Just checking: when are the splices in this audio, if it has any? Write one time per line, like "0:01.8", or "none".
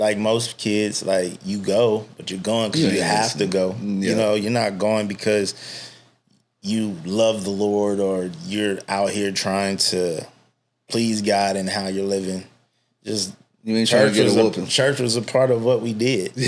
none